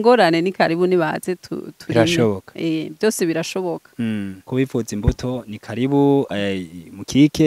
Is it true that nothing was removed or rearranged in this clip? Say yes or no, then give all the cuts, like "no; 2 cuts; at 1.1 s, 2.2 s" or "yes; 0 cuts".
no; 1 cut; at 4.4 s